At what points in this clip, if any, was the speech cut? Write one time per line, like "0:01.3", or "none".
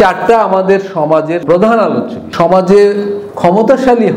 0:01.4
0:02.3